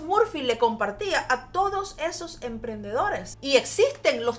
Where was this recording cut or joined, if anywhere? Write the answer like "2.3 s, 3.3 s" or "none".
3.3 s